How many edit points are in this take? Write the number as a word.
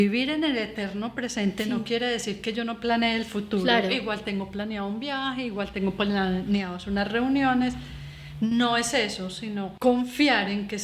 one